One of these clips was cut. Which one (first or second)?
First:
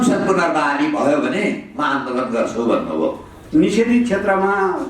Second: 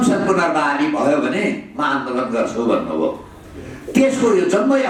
first